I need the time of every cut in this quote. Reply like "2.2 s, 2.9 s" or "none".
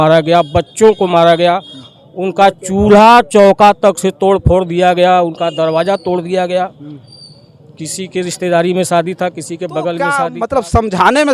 10.2 s